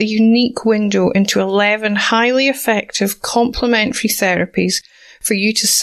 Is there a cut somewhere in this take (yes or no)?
no